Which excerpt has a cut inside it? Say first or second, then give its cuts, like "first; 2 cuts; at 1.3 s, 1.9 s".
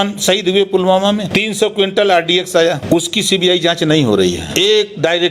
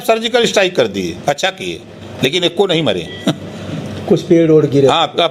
first; 3 cuts; at 1.3 s, 2.8 s, 4.5 s